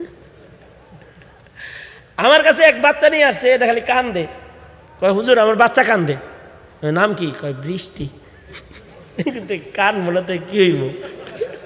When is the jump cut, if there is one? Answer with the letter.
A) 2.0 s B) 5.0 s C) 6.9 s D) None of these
D